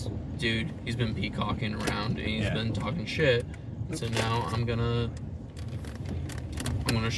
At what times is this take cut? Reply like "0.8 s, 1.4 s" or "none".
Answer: none